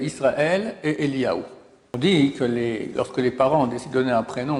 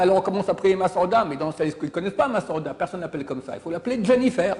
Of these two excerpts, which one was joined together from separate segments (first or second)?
first